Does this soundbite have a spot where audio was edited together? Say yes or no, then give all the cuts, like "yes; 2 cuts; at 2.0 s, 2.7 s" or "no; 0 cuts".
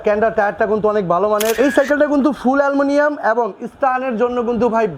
yes; 1 cut; at 1.5 s